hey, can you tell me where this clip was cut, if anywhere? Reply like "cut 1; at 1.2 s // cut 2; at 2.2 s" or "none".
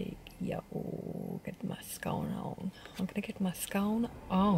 none